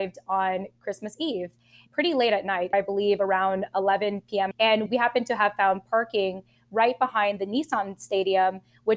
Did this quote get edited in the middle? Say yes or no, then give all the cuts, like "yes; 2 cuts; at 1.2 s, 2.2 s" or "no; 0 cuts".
no; 0 cuts